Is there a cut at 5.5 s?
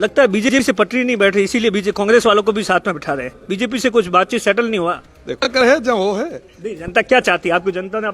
yes; 1 cut; at 5.5 s

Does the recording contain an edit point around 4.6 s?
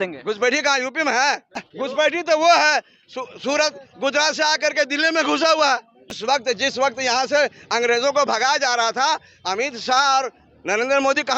no; 2 cuts; at 1.7 s, 6.1 s

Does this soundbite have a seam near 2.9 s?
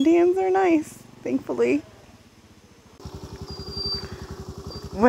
yes; 1 cut; at 2.9 s

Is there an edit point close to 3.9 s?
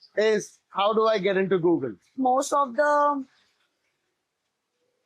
no; 1 cut; at 2.1 s

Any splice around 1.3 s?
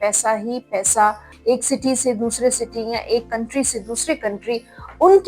yes; 1 cut; at 1.3 s

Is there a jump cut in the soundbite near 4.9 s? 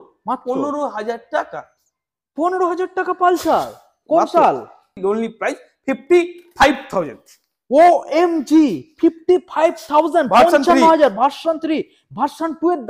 yes; 1 cut; at 4.9 s

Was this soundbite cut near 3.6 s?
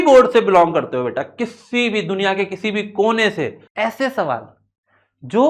yes; 1 cut; at 3.6 s

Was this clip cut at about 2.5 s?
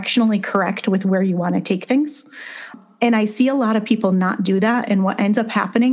yes; 1 cut; at 2.5 s

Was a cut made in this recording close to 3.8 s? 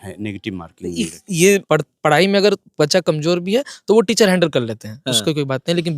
no; 1 cut; at 1.6 s

